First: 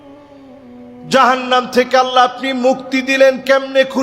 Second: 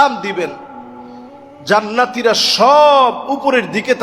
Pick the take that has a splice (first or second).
first